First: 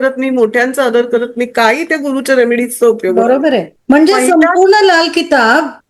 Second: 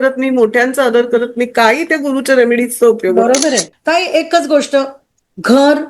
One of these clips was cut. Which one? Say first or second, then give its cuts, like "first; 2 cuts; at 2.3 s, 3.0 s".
second; 1 cut; at 3.7 s